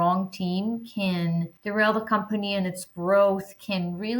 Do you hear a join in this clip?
yes; 1 cut; at 1.6 s

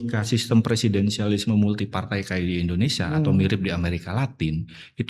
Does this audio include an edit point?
no; 0 cuts

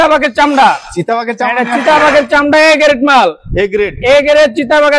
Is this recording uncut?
yes; 0 cuts

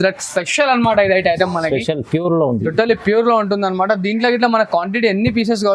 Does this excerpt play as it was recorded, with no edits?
yes; 0 cuts

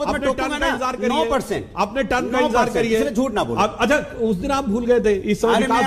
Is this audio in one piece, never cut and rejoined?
yes; 0 cuts

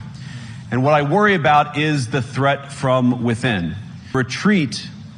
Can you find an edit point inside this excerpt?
yes; 1 cut; at 4.1 s

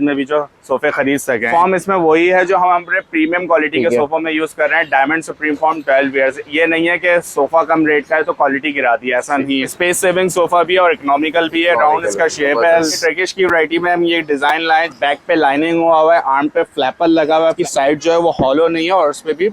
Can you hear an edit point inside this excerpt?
yes; 5 cuts; at 1.5 s, 9.7 s, 13.0 s, 14.9 s, 17.6 s

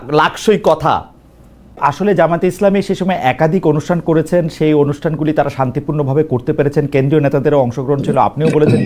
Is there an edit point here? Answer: yes; 1 cut; at 1.8 s

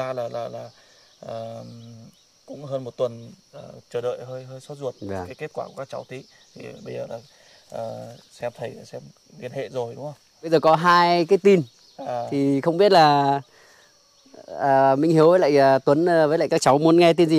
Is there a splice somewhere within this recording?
yes; 1 cut; at 10.5 s

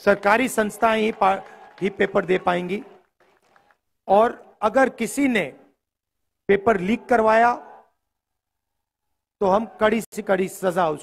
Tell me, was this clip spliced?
yes; 1 cut; at 10.1 s

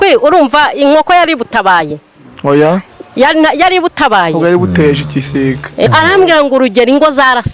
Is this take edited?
yes; 1 cut; at 5.9 s

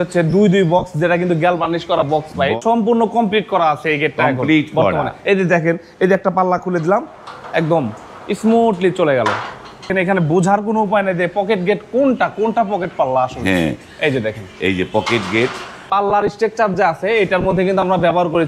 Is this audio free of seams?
no; 3 cuts; at 2.5 s, 9.9 s, 15.9 s

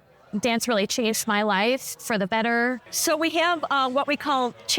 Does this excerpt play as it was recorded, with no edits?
no; 1 cut; at 2.9 s

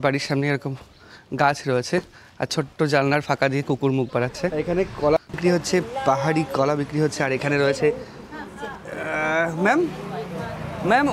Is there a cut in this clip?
yes; 1 cut; at 4.5 s

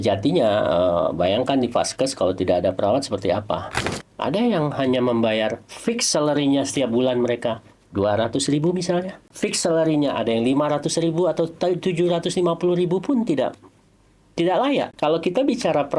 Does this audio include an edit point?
yes; 3 cuts; at 3.9 s, 9.2 s, 14.9 s

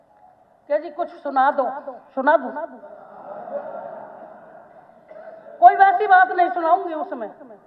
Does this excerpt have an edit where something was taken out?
no; 0 cuts

